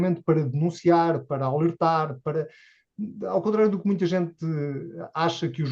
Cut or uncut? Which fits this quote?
uncut